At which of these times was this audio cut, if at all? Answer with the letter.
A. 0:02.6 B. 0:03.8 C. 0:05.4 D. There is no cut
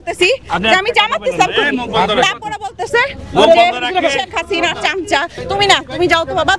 C